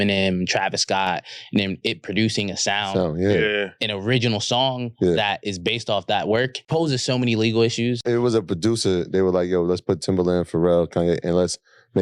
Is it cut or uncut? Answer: cut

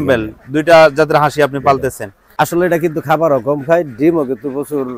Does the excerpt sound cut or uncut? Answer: cut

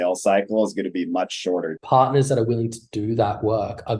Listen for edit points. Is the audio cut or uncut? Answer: cut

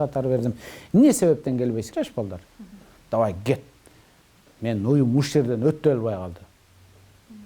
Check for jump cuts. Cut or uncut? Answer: cut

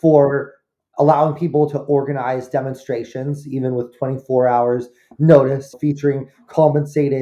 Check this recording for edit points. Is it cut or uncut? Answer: cut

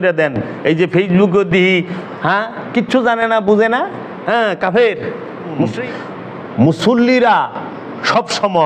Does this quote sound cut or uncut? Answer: cut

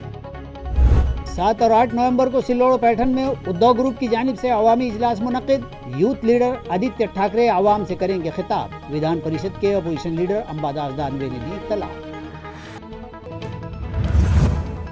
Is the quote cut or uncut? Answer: uncut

